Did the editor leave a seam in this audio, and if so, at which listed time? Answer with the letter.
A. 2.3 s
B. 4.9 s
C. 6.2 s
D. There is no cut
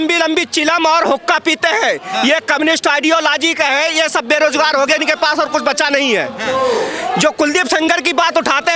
D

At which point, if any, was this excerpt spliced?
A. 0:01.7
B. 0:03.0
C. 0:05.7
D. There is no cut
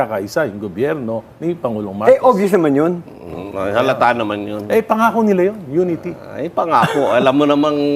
D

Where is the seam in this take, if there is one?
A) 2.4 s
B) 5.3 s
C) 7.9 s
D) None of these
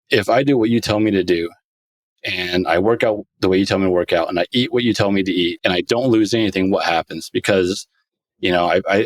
D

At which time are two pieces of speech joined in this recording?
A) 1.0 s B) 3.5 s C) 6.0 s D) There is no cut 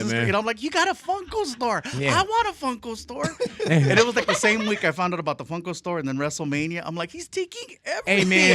D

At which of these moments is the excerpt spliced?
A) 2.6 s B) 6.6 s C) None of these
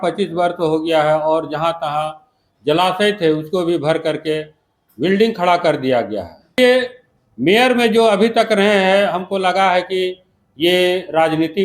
B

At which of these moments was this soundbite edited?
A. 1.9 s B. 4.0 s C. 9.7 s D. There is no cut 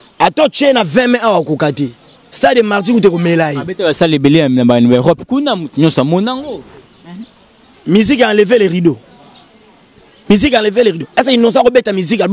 D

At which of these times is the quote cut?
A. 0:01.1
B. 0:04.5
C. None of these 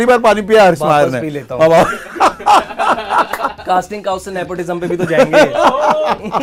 C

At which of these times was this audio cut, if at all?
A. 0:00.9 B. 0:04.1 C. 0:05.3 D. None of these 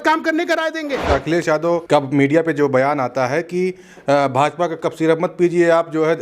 A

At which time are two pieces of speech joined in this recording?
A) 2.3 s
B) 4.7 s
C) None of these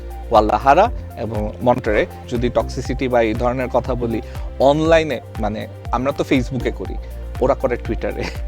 A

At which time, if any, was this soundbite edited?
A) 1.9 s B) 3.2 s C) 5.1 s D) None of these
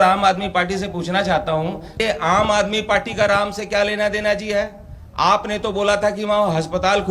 A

